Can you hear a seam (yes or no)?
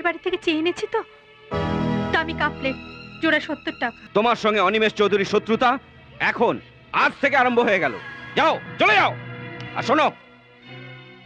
yes